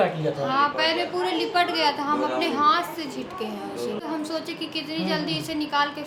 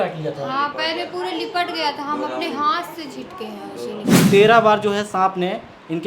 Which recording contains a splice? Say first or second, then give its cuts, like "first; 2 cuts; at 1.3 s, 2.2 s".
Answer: second; 1 cut; at 4.1 s